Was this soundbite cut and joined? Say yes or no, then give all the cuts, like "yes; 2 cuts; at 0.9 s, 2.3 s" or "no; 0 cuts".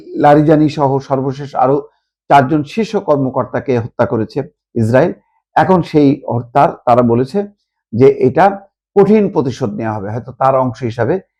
no; 0 cuts